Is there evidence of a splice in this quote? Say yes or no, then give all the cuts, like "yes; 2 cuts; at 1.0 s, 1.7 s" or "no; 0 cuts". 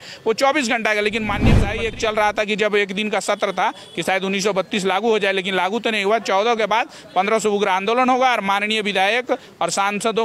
yes; 1 cut; at 1.7 s